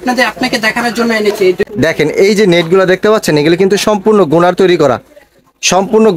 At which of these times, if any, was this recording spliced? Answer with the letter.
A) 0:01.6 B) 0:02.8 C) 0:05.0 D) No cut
A